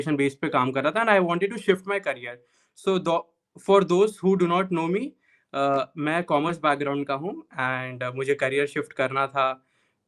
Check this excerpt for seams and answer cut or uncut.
uncut